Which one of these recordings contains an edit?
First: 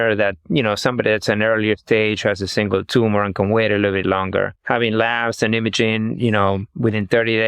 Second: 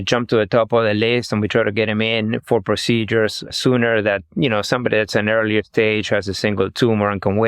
first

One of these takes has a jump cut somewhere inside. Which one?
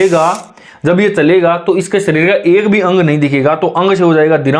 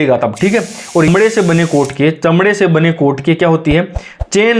second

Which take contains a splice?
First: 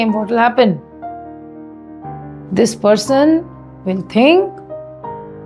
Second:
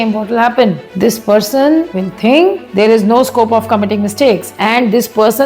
second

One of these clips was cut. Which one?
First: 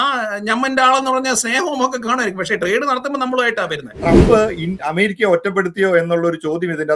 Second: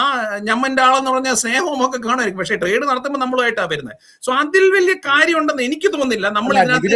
first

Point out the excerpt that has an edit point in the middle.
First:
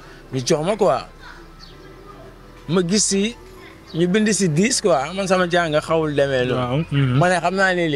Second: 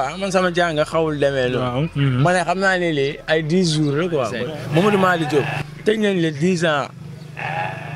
second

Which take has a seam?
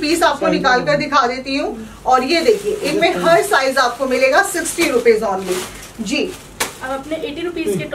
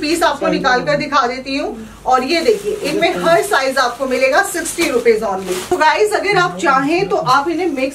second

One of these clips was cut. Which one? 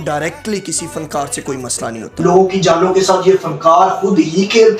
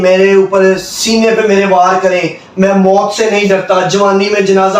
first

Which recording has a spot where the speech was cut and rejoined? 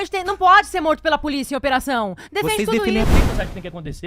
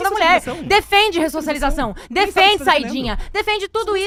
first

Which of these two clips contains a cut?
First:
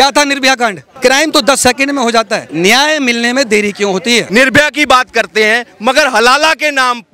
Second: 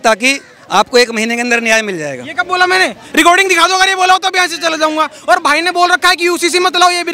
first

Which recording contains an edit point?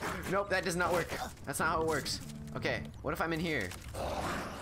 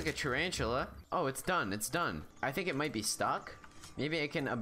second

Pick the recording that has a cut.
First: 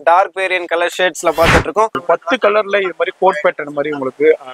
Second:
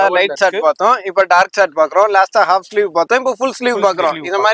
first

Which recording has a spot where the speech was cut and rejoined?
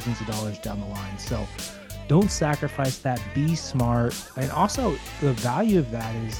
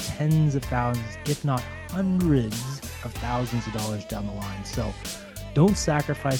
first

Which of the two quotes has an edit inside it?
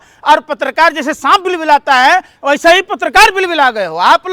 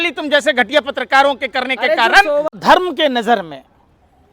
second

